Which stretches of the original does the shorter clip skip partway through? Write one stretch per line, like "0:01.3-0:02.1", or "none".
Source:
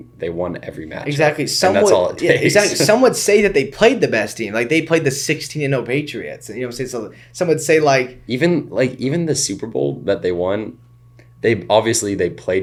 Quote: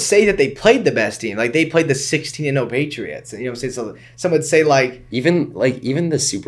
none